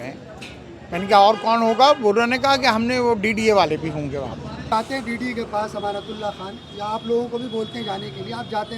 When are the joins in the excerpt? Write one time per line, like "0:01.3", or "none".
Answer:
0:04.7